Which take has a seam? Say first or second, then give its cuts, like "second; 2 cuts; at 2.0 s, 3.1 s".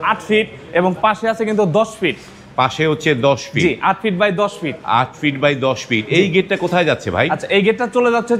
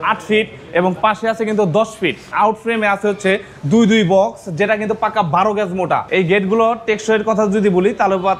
second; 2 cuts; at 2.3 s, 6.1 s